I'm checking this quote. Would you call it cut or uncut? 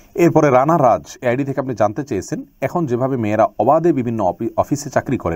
uncut